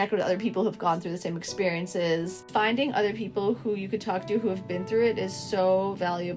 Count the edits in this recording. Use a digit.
1